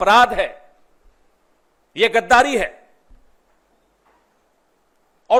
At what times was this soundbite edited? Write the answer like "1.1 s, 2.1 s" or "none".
none